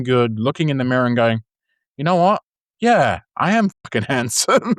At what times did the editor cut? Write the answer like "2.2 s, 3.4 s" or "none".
none

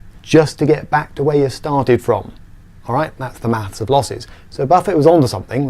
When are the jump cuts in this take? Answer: 2.1 s

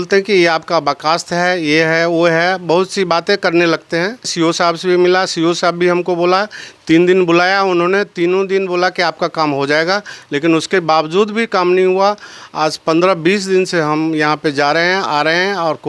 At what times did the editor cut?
4.3 s

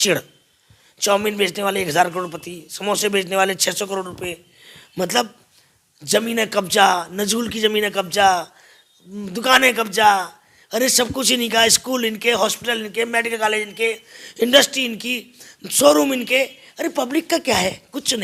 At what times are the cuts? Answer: none

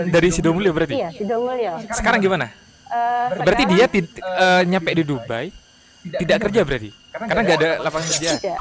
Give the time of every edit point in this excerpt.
none

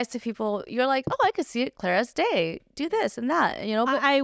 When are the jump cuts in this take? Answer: none

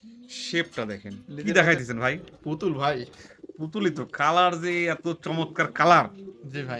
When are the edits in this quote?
1.3 s

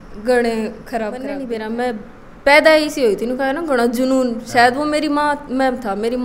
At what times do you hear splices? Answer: 1.3 s

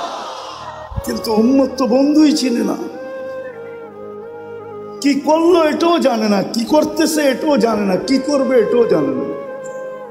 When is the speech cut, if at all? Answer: none

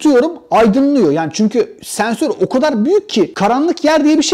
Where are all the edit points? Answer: none

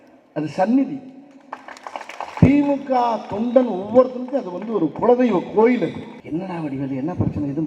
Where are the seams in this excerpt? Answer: 2.4 s, 6.1 s

